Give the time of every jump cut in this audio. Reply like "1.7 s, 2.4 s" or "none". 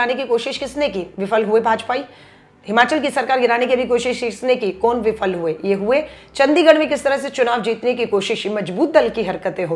none